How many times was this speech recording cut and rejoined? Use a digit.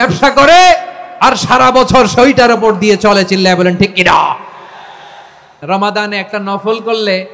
1